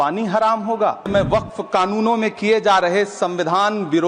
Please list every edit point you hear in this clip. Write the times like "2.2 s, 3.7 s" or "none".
1.1 s